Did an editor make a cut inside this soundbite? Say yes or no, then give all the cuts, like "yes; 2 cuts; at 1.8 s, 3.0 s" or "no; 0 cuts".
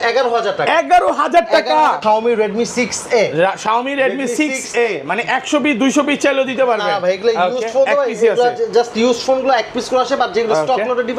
yes; 1 cut; at 2.0 s